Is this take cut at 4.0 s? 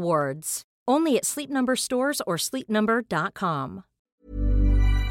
yes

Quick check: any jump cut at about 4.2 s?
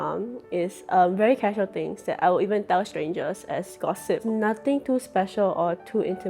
yes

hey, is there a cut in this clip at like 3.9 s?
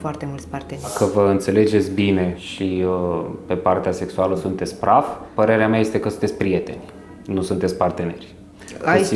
no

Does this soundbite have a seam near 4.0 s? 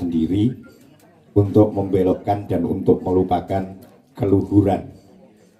no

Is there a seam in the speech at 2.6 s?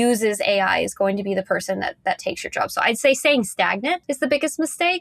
no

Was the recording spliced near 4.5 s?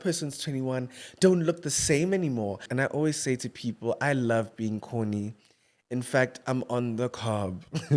no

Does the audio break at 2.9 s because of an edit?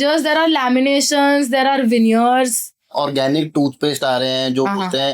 yes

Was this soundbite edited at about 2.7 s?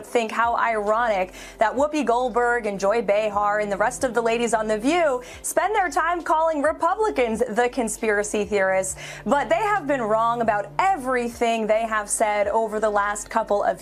no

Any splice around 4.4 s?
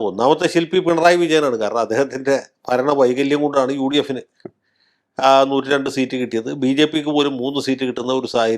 no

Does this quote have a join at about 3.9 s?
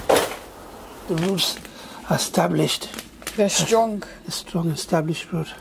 no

